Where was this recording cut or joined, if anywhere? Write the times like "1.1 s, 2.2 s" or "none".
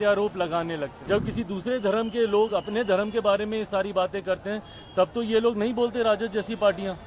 0.9 s